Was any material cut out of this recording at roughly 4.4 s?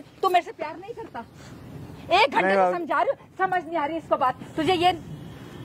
no; 0 cuts

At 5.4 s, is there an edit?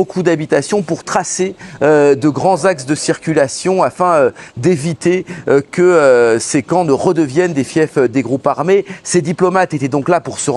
no; 0 cuts

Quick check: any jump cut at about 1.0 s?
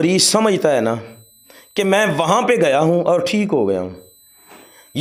no; 0 cuts

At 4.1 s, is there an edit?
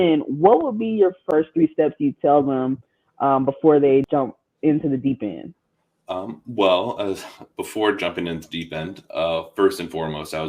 yes; 2 cuts; at 1.2 s, 4.1 s

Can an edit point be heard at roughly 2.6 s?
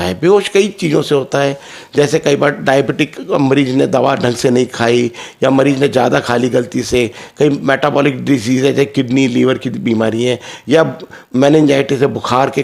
no; 0 cuts

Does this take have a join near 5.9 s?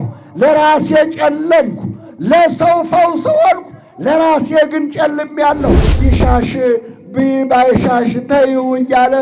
yes; 1 cut; at 5.9 s

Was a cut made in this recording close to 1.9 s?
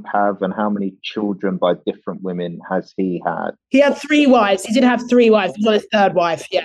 no; 1 cut; at 3.6 s

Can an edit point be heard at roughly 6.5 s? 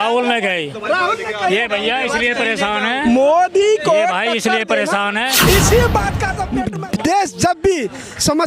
yes; 1 cut; at 6.5 s

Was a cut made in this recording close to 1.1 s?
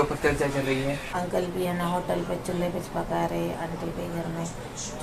yes; 1 cut; at 1.1 s

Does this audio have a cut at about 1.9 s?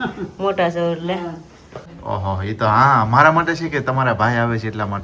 yes; 1 cut; at 1.9 s

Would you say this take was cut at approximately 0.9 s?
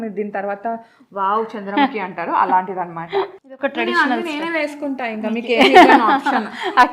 no; 1 cut; at 3.4 s

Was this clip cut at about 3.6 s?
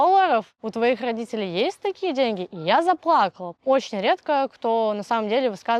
yes; 1 cut; at 3.6 s

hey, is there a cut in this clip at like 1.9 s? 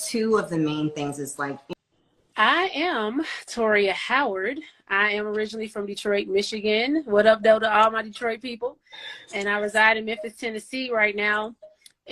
yes; 1 cut; at 1.9 s

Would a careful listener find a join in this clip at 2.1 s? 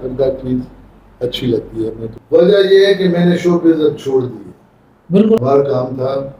yes; 2 cuts; at 2.1 s, 5.4 s

